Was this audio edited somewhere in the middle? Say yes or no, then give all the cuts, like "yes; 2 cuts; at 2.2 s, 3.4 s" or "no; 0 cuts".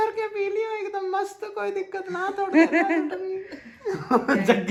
no; 0 cuts